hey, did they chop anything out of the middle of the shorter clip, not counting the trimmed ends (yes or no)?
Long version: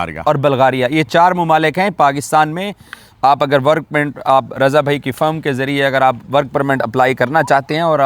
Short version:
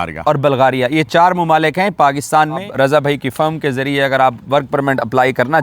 yes